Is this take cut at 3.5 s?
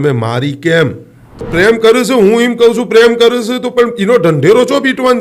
no; 1 cut; at 1.5 s

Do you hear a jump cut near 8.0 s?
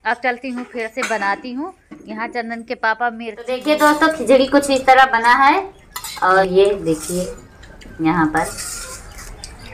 no; 2 cuts; at 3.6 s, 6.5 s

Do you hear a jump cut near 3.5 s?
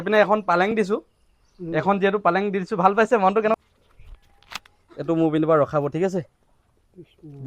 yes; 1 cut; at 3.5 s

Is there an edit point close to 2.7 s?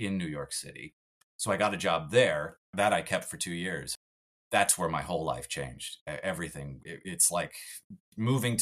yes; 1 cut; at 2.7 s

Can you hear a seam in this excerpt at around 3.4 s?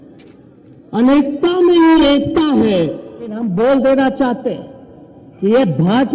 yes; 1 cut; at 3.4 s

